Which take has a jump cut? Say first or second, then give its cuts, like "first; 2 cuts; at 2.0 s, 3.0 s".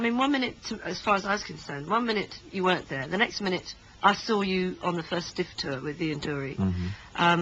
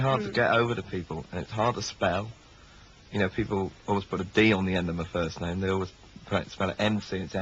first; 1 cut; at 5.3 s